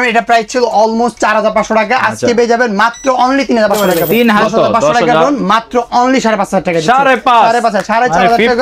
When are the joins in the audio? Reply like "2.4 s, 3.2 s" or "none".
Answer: 4.4 s